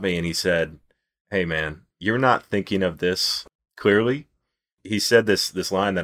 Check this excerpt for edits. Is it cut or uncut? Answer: cut